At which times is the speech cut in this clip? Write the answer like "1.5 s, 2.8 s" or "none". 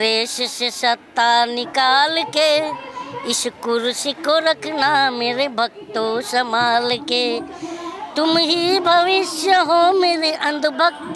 none